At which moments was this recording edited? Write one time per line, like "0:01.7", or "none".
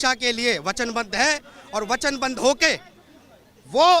none